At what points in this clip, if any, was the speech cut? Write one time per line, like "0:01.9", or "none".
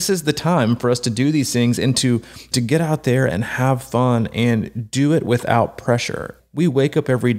0:02.5
0:06.3